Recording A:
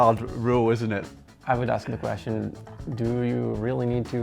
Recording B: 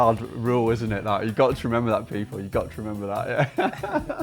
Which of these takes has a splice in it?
A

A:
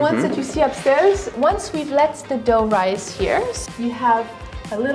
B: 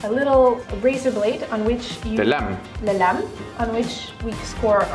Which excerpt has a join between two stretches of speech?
A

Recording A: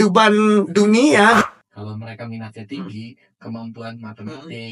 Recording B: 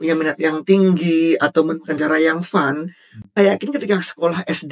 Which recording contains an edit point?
A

